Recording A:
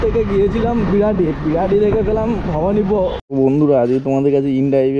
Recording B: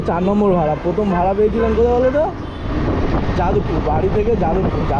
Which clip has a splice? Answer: A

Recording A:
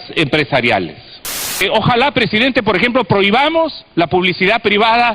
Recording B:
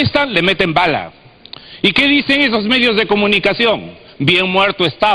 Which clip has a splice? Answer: A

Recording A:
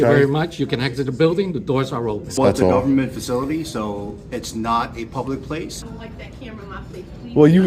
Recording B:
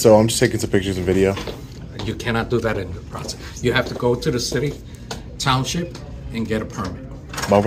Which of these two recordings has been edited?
A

